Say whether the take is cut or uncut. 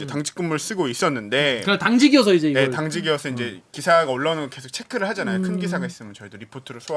uncut